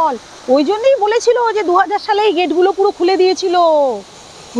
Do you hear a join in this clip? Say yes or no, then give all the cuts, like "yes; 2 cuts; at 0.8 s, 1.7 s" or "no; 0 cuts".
no; 0 cuts